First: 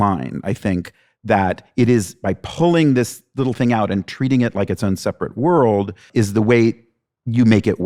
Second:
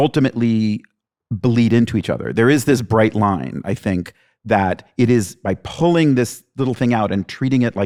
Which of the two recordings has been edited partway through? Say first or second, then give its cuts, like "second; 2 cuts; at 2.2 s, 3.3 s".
first; 1 cut; at 6.0 s